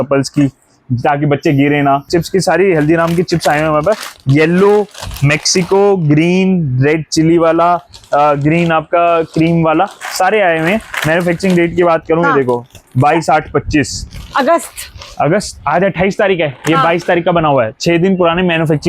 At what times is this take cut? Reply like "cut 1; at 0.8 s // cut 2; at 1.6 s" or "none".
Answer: cut 1; at 2.1 s

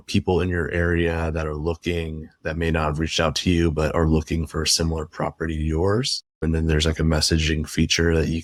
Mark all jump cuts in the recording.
none

